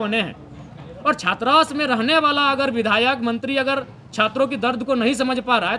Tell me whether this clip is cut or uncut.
uncut